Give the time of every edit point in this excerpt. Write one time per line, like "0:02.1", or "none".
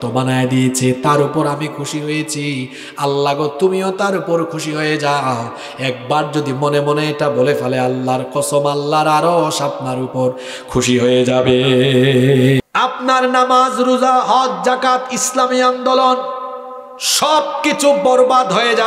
0:12.6